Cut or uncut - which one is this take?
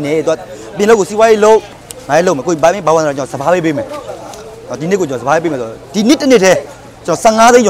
cut